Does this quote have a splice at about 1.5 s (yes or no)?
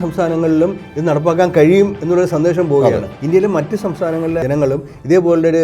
no